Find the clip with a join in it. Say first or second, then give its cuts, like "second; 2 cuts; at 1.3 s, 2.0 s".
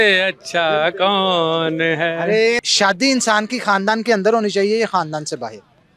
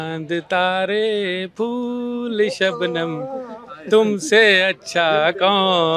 first; 1 cut; at 2.6 s